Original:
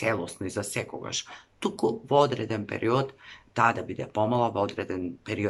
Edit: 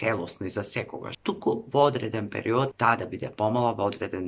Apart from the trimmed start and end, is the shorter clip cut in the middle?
yes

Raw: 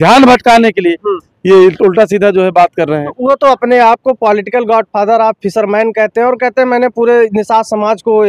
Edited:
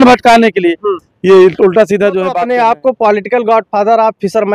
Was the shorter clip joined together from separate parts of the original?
yes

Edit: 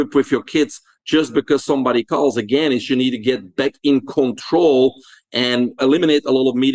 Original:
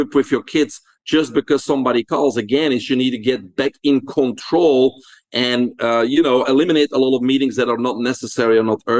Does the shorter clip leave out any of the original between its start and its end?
yes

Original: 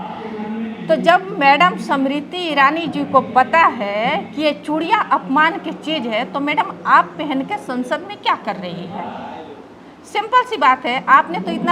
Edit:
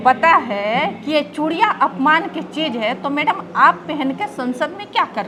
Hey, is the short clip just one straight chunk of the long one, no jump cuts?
yes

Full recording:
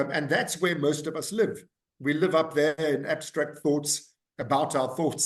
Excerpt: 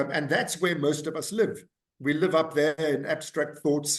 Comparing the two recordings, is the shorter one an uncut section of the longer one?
yes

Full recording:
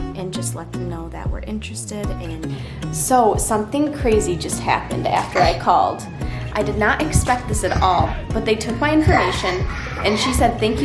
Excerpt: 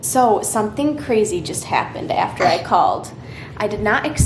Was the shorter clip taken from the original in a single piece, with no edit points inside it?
yes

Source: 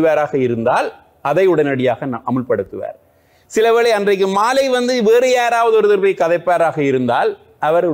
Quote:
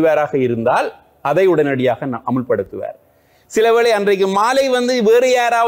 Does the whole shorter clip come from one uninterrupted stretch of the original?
yes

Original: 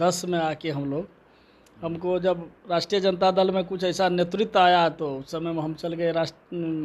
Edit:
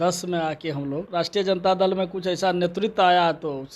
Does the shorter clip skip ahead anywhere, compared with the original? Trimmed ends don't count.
yes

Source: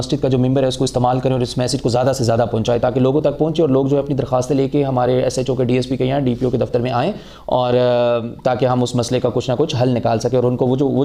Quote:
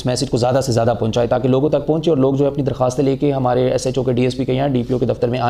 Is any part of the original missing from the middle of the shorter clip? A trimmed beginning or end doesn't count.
no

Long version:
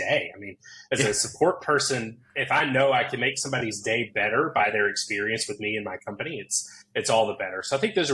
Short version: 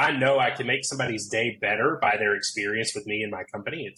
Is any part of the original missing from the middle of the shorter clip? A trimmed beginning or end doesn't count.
no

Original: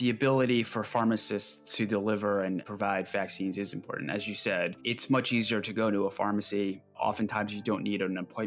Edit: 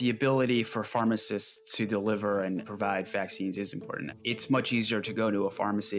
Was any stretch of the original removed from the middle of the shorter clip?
yes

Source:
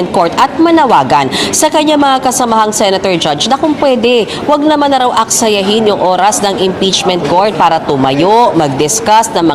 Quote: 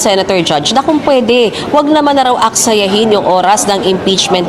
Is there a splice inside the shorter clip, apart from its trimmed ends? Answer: no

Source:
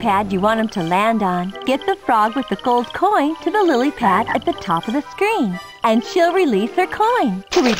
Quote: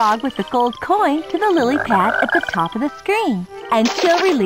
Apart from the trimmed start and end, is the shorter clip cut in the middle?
no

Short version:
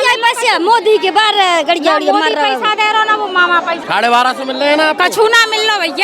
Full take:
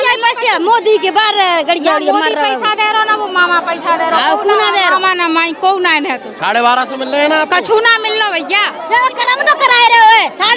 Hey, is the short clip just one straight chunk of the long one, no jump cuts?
no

